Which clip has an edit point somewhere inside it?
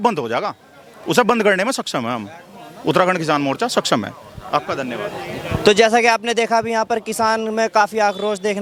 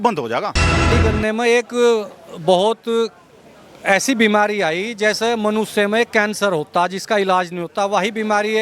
second; 1 cut; at 1.0 s

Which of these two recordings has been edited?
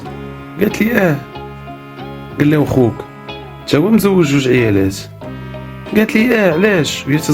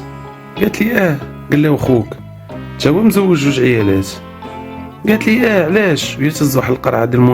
second; 1 cut; at 1.3 s

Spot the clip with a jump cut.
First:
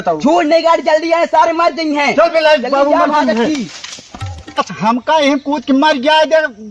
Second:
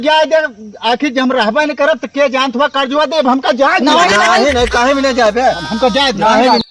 first; 1 cut; at 4.6 s

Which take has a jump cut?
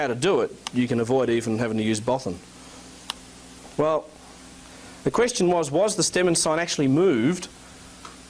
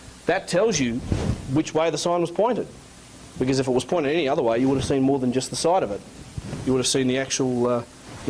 second; 1 cut; at 3.3 s

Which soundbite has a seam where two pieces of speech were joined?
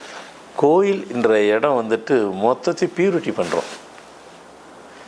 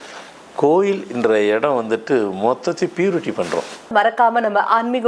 second; 1 cut; at 3.8 s

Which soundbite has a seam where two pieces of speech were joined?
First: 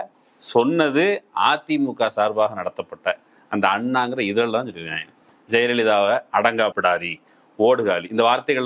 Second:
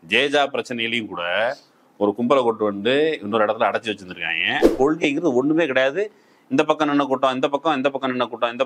second; 1 cut; at 4.7 s

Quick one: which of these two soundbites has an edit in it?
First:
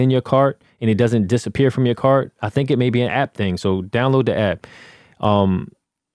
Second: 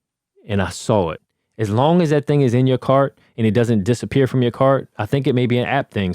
second; 1 cut; at 1.2 s

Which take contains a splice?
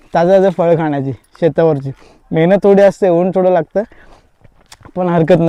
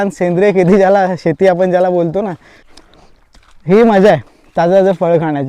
second; 1 cut; at 2.7 s

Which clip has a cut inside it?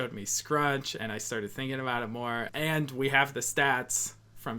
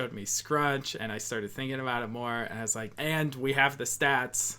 first; 1 cut; at 2.5 s

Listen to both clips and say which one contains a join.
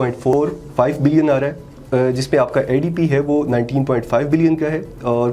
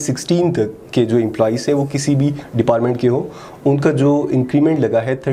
first; 1 cut; at 1.8 s

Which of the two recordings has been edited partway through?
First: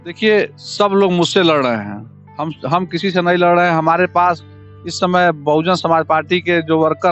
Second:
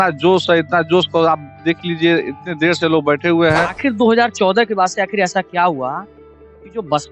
second; 1 cut; at 3.7 s

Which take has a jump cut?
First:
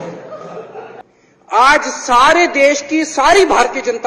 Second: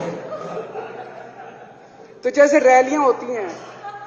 first; 1 cut; at 1.1 s

